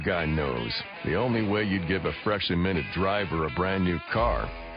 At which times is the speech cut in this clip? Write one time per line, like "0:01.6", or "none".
0:01.2